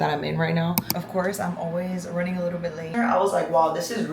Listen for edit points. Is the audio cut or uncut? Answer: cut